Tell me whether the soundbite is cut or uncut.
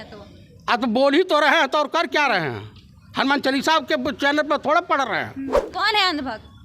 cut